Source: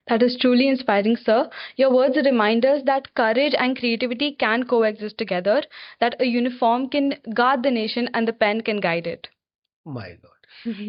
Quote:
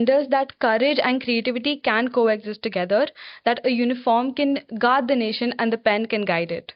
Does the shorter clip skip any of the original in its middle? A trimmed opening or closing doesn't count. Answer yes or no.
no